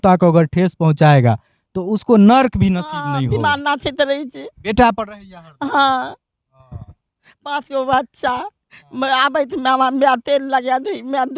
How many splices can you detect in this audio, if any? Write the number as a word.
one